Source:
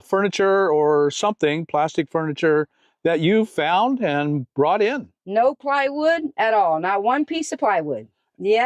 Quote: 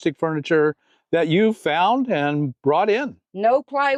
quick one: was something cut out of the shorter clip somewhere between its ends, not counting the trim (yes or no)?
no